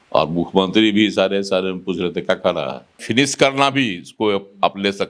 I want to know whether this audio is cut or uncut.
cut